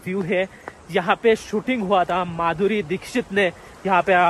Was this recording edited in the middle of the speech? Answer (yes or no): no